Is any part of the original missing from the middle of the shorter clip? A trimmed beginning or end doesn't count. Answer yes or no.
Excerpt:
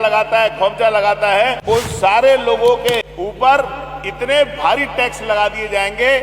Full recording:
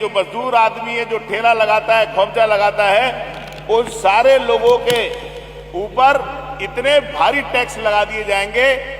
yes